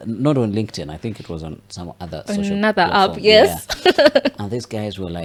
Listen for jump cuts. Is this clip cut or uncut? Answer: uncut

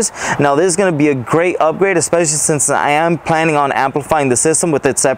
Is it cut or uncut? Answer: uncut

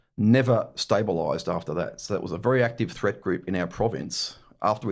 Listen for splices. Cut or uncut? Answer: uncut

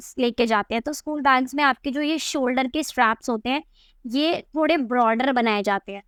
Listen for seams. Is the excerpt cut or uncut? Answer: uncut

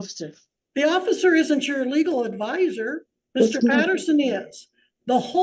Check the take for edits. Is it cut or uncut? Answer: uncut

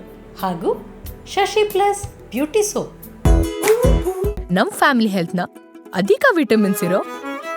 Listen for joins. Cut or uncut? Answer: cut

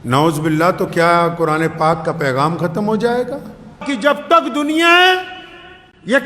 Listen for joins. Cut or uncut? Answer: cut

